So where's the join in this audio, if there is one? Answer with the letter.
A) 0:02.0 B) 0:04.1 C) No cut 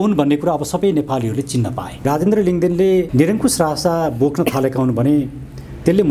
A